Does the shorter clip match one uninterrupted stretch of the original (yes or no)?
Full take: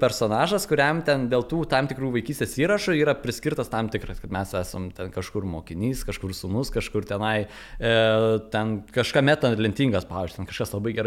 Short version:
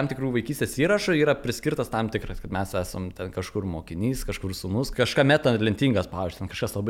no